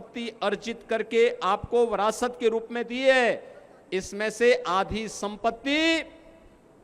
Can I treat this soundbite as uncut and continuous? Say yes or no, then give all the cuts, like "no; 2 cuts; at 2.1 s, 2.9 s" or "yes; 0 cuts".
yes; 0 cuts